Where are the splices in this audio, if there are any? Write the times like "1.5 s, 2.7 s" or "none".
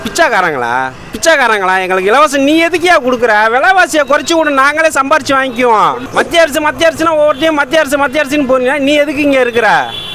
1.0 s, 6.0 s